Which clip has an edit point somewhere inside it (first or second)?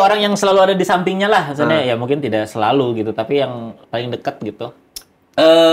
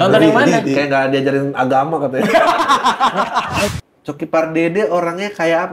second